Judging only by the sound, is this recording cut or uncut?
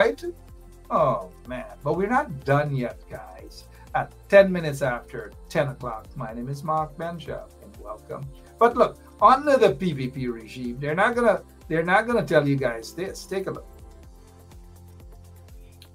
uncut